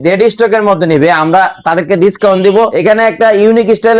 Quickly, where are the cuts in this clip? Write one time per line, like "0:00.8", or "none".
0:02.7

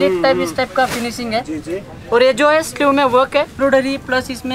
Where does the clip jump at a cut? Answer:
0:03.6

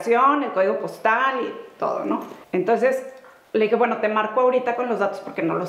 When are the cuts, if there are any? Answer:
0:02.3

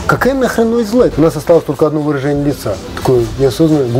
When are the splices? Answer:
0:01.1

